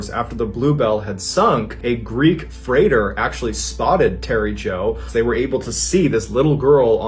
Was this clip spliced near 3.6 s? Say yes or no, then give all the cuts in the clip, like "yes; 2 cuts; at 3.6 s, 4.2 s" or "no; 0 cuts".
no; 2 cuts; at 1.7 s, 5.0 s